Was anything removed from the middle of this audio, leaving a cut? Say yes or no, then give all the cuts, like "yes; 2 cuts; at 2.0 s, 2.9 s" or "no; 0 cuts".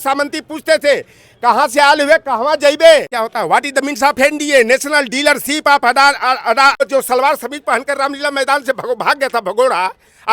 yes; 2 cuts; at 3.2 s, 6.8 s